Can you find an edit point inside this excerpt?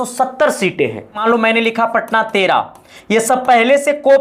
yes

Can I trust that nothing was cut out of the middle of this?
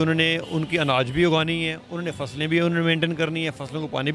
yes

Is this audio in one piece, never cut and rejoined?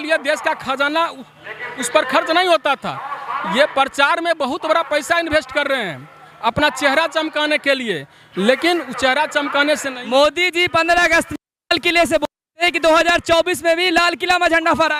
yes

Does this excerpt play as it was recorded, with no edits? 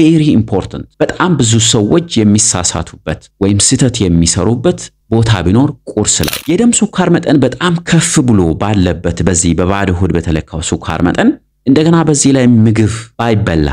no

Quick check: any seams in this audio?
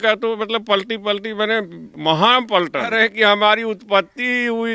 yes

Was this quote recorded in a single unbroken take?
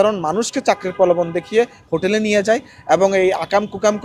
yes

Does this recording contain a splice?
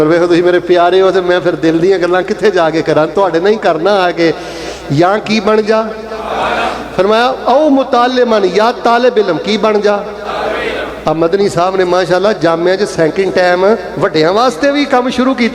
no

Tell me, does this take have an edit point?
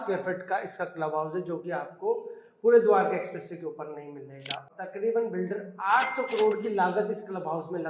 no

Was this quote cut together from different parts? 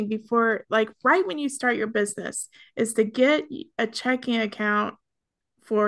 no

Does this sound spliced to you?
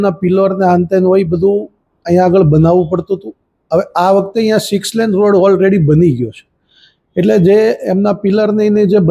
no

